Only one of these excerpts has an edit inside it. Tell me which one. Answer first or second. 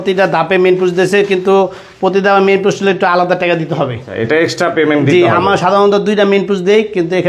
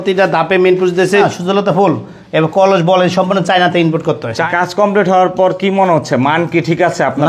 second